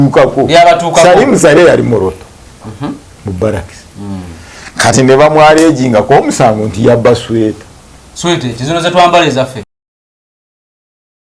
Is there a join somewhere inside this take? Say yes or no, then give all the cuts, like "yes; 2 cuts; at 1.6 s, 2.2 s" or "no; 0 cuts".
no; 0 cuts